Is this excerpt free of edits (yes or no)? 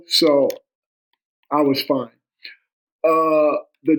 yes